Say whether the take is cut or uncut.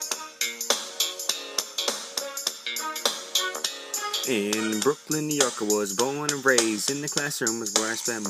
uncut